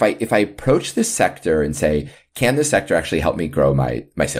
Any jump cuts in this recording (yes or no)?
no